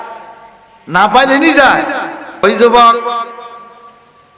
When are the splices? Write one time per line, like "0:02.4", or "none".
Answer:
0:02.4